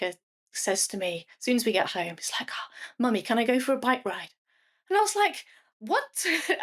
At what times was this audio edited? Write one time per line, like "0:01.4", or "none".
0:05.7